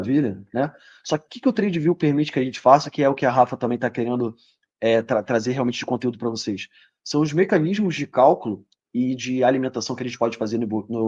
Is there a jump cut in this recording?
no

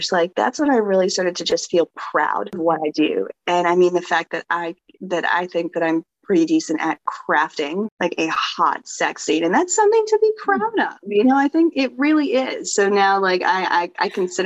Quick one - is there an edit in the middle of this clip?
yes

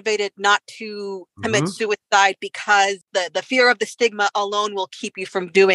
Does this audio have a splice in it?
yes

